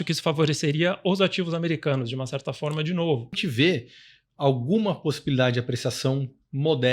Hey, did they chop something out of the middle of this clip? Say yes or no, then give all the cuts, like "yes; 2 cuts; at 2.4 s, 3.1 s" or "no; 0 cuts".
yes; 1 cut; at 3.4 s